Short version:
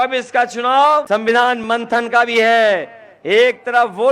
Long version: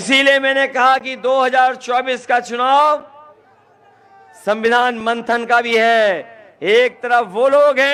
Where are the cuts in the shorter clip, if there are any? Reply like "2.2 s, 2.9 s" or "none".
1.1 s

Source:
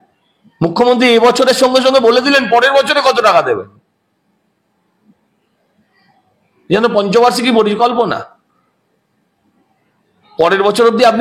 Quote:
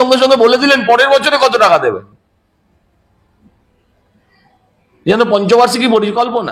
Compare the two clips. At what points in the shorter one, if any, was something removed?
none

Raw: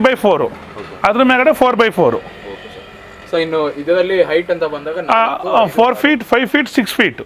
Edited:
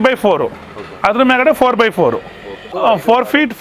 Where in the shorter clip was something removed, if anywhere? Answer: 2.7 s

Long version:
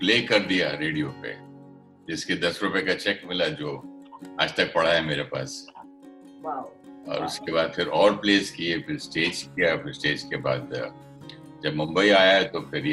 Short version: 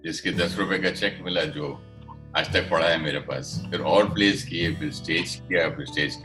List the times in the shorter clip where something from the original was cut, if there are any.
3.7 s

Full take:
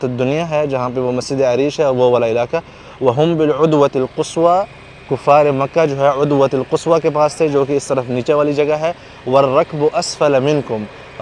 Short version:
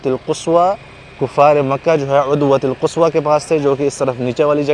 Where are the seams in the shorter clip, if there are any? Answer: none

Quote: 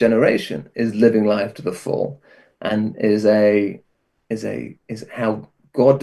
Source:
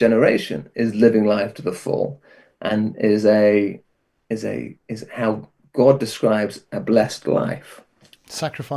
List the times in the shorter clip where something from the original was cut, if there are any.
none

